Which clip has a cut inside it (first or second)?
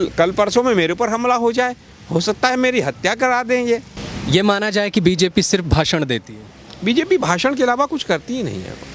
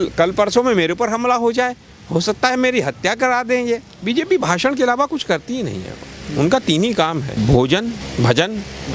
second